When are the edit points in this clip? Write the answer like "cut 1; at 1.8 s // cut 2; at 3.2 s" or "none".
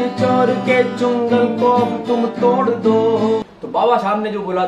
cut 1; at 3.4 s